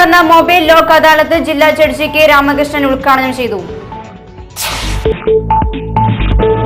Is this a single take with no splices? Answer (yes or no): yes